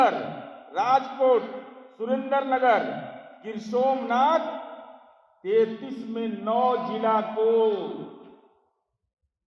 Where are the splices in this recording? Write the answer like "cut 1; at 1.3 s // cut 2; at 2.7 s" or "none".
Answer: none